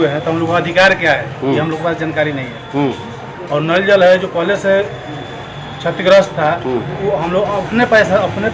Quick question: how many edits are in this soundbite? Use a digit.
0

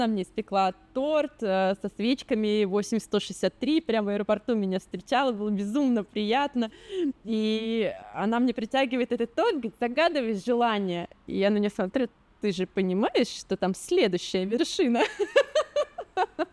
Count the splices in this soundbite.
0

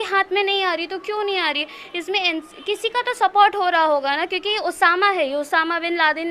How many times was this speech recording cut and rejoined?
0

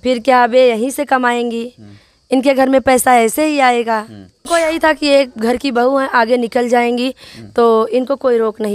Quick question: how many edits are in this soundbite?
1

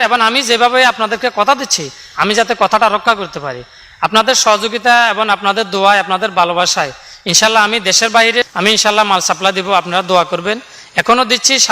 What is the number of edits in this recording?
1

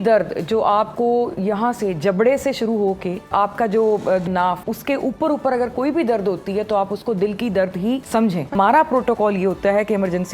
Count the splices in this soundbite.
3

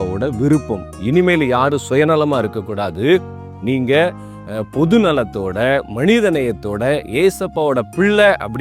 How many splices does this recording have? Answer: 1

